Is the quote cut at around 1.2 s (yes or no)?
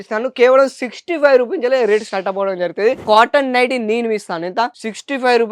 no